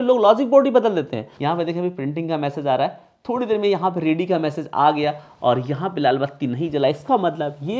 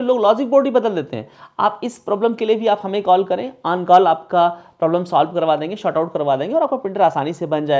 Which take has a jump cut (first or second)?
first